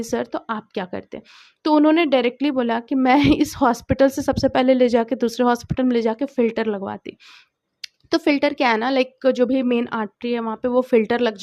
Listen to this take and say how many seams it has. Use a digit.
0